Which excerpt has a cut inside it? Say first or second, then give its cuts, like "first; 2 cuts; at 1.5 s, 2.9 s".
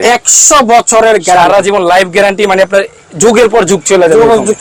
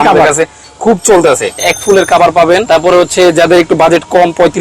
second; 2 cuts; at 1.7 s, 2.7 s